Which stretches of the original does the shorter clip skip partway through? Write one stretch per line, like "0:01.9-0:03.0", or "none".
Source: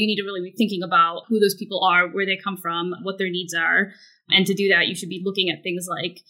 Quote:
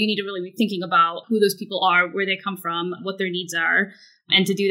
none